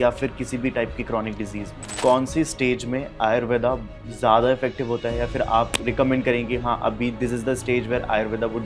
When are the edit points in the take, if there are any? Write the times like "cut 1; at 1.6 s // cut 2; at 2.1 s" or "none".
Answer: cut 1; at 1.9 s // cut 2; at 5.7 s